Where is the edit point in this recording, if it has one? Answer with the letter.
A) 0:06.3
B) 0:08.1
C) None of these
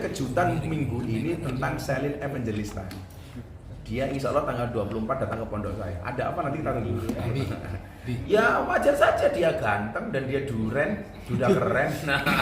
B